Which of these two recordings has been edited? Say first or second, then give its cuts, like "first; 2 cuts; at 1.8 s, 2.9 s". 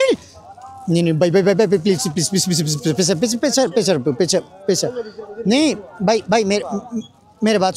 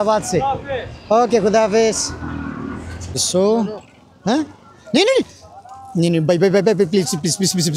second; 1 cut; at 3.2 s